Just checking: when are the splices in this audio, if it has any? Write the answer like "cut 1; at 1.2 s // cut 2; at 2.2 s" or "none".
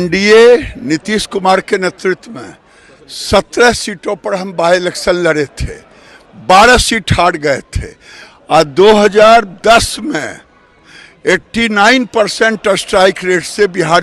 none